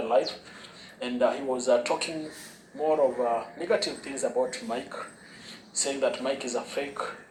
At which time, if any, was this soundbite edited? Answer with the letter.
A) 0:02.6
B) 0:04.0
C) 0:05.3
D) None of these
D